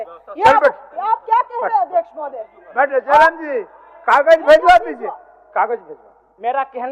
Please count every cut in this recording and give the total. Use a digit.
0